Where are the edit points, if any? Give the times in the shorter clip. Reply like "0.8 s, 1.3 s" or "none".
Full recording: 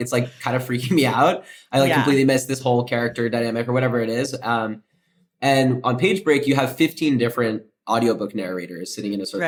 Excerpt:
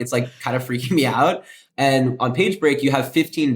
1.5 s